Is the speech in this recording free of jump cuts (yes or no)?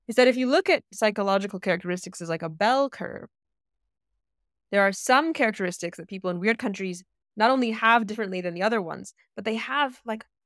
yes